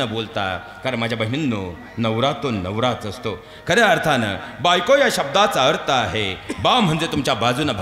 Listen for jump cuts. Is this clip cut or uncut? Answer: uncut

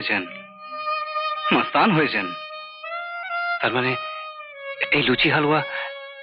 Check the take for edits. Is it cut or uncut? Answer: uncut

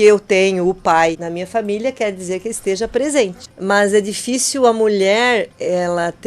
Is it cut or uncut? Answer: cut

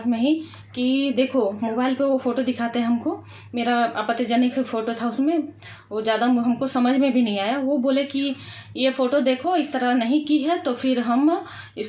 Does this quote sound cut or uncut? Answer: uncut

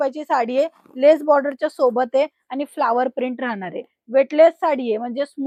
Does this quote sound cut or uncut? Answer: uncut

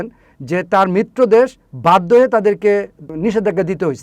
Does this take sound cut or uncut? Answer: cut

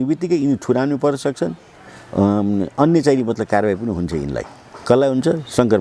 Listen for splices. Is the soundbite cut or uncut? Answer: uncut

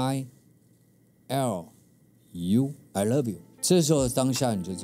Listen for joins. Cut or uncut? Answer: uncut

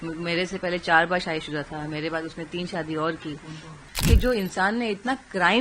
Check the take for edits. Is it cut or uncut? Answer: cut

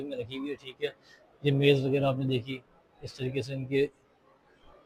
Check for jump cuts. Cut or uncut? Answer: uncut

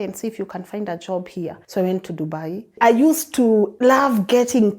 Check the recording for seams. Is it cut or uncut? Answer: cut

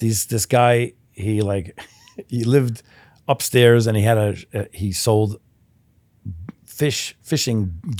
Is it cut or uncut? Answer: uncut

